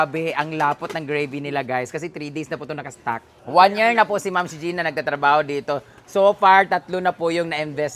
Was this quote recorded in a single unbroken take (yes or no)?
no